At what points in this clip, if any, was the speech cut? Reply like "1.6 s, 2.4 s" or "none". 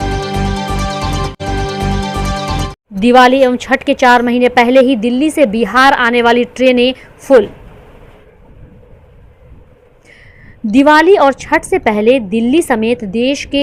none